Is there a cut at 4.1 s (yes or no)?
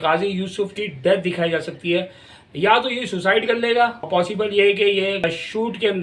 yes